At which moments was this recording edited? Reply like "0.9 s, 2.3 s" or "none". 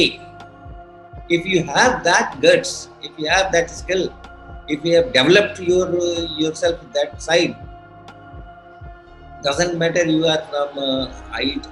none